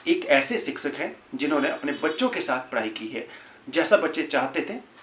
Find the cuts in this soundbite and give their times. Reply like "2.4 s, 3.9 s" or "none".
none